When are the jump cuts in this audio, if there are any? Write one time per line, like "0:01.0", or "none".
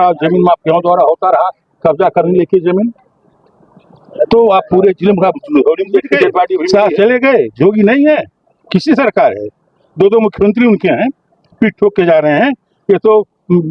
0:06.6